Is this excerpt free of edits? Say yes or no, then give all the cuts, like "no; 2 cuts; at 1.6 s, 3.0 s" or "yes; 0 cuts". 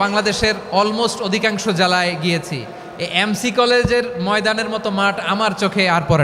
yes; 0 cuts